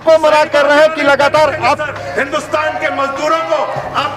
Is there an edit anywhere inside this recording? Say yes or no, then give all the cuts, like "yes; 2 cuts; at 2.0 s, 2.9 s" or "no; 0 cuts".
yes; 1 cut; at 1.9 s